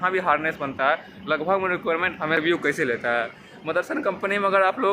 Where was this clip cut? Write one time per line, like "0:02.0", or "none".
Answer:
0:02.4